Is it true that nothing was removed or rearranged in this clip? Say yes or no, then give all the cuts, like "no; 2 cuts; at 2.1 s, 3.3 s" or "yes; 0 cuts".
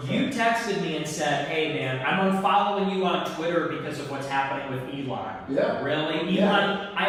yes; 0 cuts